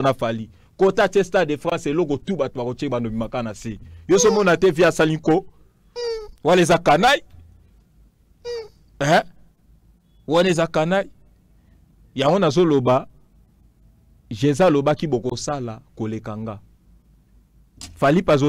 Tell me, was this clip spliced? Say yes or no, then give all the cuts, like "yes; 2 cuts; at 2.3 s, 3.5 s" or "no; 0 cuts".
no; 0 cuts